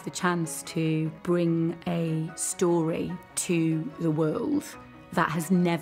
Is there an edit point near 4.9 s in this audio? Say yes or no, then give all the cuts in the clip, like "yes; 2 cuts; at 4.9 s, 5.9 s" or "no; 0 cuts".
no; 0 cuts